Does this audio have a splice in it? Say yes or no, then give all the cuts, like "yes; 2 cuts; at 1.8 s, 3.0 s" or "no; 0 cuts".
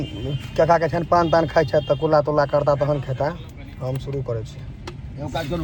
no; 0 cuts